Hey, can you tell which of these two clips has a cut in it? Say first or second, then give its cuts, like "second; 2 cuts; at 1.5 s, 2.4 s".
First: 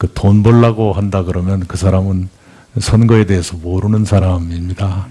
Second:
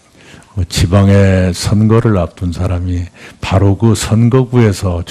second; 1 cut; at 1.9 s